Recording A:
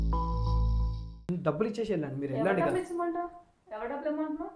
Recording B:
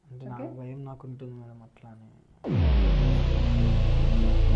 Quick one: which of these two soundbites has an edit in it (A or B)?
A